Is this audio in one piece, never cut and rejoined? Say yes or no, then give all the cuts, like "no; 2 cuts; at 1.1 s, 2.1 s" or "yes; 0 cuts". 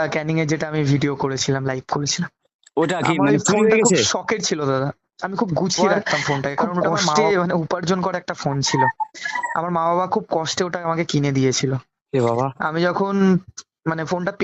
no; 1 cut; at 7.2 s